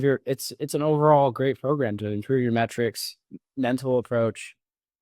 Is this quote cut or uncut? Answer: uncut